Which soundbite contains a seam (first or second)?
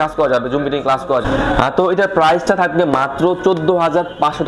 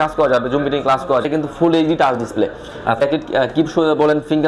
second